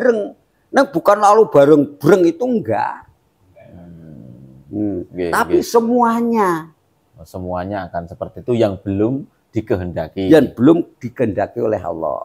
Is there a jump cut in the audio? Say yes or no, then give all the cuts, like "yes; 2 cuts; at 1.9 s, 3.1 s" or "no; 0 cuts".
no; 0 cuts